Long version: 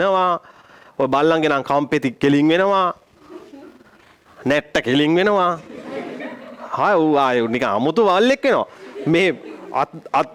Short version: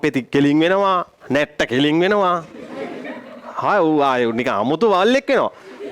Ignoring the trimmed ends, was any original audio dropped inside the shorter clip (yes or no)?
yes